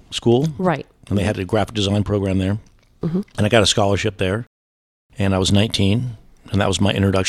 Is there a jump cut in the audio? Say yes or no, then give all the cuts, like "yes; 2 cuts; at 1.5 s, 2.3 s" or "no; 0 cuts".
no; 0 cuts